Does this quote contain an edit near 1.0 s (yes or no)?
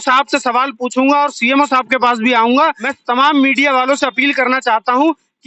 no